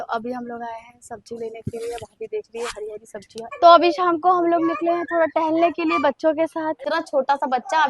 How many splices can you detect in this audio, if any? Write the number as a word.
two